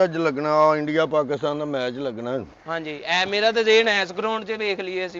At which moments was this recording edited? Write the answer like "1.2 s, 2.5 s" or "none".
none